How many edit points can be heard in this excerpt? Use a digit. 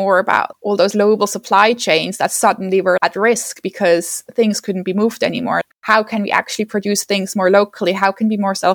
1